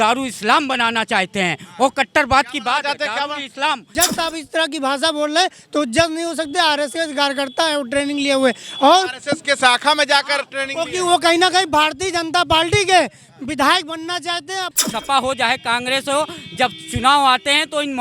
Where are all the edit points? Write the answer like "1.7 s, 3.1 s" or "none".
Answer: 3.9 s, 14.7 s